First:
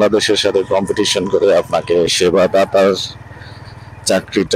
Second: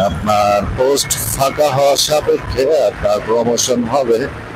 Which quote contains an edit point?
first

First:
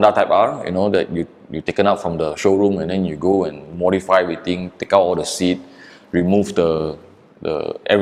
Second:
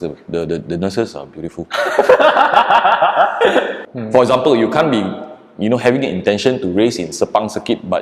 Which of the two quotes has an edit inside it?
second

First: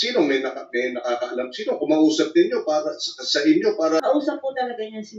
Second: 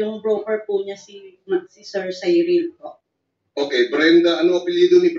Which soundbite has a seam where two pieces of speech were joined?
first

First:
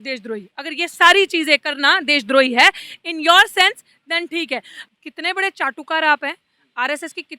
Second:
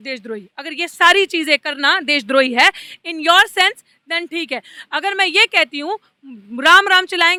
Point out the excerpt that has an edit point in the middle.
first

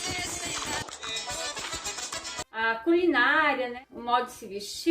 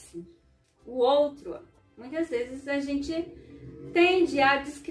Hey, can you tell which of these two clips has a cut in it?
first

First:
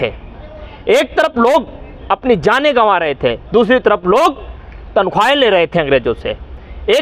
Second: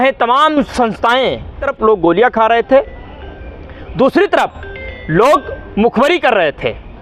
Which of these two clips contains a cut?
second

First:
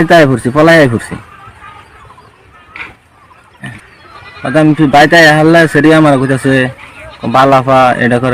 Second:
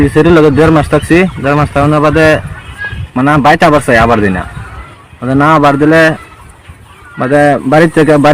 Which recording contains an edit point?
first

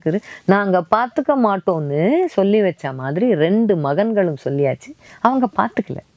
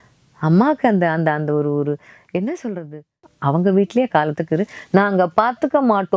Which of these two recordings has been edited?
second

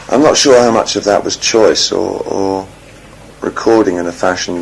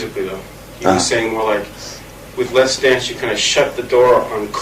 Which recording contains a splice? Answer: second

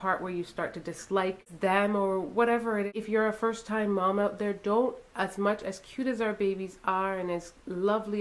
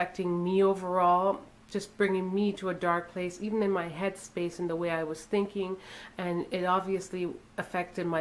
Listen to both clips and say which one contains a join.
first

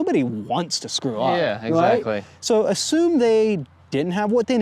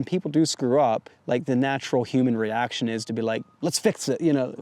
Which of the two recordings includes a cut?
second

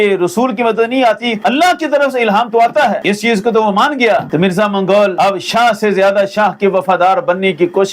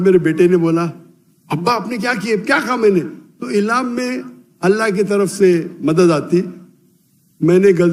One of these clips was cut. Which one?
first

